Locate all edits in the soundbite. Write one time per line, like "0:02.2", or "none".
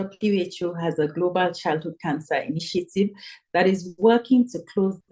none